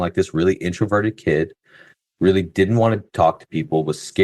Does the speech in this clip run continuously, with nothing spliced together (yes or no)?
yes